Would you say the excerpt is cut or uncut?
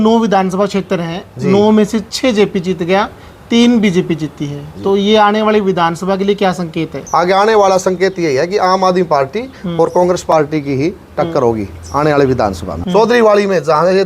cut